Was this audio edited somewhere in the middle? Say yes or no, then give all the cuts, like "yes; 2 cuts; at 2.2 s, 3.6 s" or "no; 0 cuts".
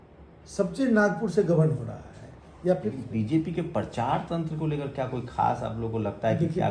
yes; 1 cut; at 3.0 s